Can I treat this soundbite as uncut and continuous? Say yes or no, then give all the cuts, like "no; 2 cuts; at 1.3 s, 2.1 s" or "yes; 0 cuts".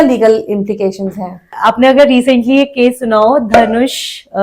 no; 1 cut; at 1.5 s